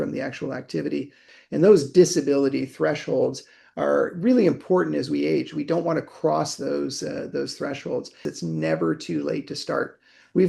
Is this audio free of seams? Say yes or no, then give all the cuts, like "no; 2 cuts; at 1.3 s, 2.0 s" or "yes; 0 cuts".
no; 2 cuts; at 1.3 s, 8.2 s